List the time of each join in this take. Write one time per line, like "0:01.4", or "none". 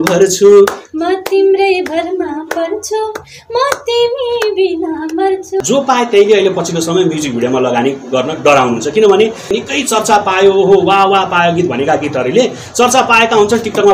0:05.6
0:09.6

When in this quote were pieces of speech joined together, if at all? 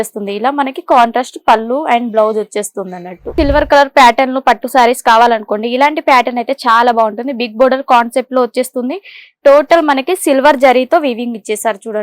0:03.3

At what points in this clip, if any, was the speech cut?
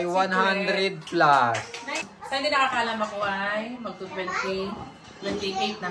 0:02.1

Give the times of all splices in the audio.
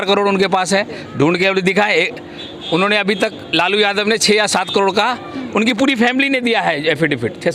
none

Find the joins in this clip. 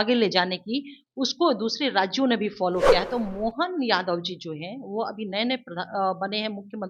none

